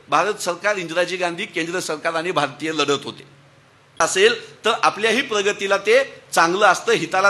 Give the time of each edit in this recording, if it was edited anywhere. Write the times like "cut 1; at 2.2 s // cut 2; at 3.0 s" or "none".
cut 1; at 3.9 s